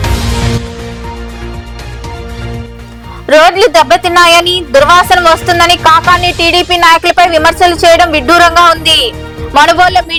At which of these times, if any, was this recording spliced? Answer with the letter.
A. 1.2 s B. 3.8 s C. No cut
C